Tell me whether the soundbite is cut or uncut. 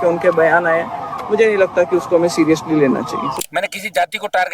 cut